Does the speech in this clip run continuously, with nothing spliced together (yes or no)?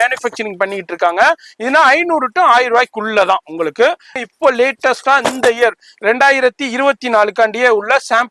no